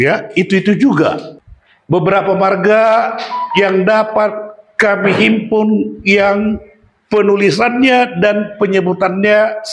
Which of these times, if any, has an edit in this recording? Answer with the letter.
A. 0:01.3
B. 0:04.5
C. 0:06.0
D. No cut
A